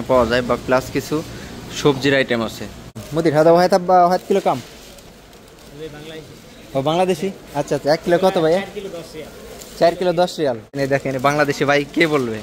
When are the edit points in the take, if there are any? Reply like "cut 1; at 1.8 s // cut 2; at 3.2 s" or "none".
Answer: cut 1; at 3.0 s // cut 2; at 10.8 s